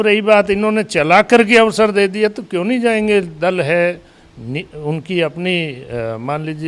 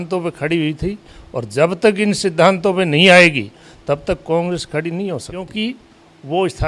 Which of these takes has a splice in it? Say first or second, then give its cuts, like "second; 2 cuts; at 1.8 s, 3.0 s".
second; 1 cut; at 5.5 s